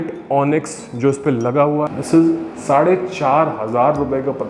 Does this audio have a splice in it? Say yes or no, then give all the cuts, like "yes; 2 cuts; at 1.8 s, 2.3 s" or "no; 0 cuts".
yes; 1 cut; at 2.0 s